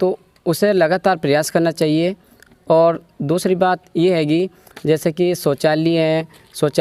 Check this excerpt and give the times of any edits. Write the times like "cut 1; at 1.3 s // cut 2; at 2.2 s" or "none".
none